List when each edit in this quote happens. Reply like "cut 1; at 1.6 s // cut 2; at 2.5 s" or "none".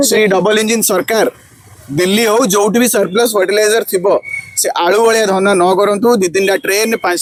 none